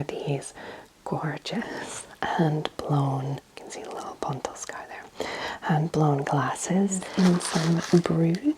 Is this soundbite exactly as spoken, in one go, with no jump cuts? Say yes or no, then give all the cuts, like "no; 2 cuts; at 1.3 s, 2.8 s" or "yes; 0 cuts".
no; 1 cut; at 7.0 s